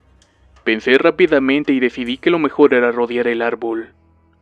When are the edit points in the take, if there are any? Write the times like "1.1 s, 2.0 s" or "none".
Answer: 2.0 s